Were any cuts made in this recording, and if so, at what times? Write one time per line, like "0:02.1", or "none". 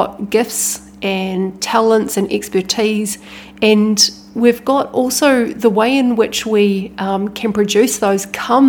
none

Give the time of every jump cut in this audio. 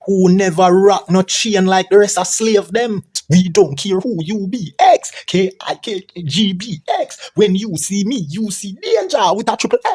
0:03.2

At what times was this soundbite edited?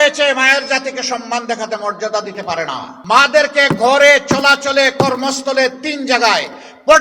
0:02.9

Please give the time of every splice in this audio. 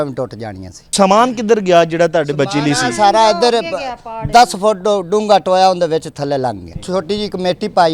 0:00.9
0:06.7

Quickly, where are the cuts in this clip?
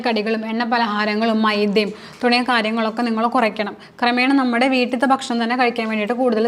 none

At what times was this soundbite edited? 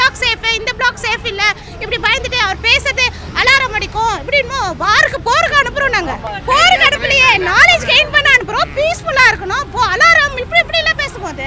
0:06.2

